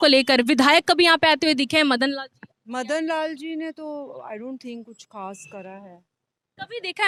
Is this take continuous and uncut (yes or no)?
yes